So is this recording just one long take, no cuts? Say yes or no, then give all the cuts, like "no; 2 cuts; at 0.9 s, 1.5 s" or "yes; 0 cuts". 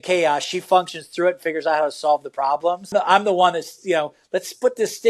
no; 1 cut; at 2.9 s